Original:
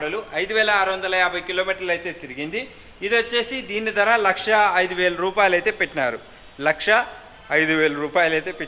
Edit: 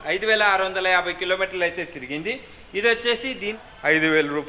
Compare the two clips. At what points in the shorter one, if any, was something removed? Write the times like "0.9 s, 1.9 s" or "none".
3.5 s